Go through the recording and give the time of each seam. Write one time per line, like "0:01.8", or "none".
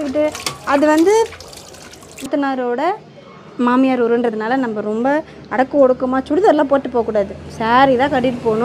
0:02.3